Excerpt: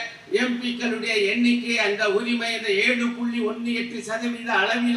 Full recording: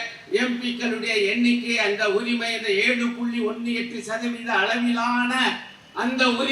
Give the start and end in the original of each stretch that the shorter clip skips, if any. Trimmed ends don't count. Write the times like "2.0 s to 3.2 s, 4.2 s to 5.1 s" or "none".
none